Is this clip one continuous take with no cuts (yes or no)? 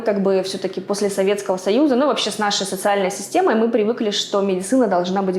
yes